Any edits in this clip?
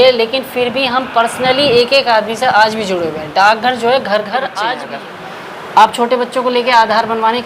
yes; 1 cut; at 4.9 s

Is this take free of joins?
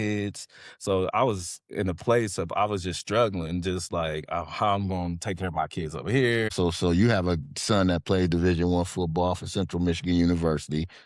no; 1 cut; at 6.5 s

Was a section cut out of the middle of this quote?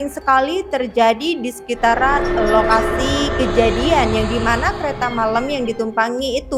no; 0 cuts

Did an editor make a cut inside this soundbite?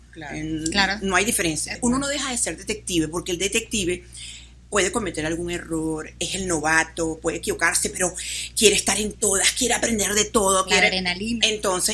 yes; 1 cut; at 1.8 s

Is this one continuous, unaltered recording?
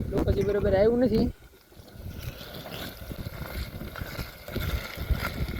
yes; 0 cuts

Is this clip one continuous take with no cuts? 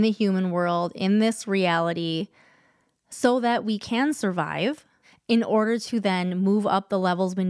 yes; 0 cuts

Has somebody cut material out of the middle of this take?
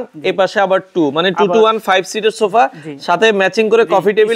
no; 0 cuts

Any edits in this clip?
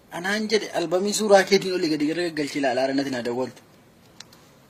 no; 0 cuts

